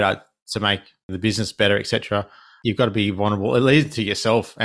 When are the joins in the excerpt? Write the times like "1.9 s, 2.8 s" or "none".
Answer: 1.1 s, 2.4 s